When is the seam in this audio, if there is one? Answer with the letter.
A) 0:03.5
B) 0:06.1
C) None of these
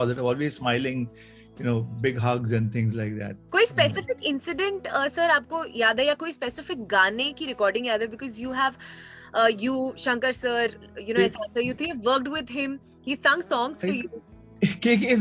C